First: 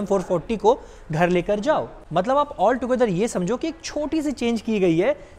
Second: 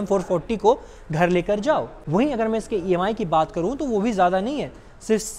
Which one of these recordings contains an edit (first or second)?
first